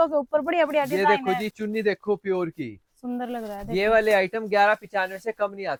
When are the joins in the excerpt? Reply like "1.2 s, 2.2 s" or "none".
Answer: none